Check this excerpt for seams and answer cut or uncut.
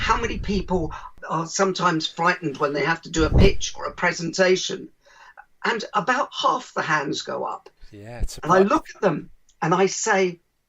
cut